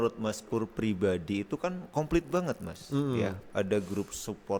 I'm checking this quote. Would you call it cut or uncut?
uncut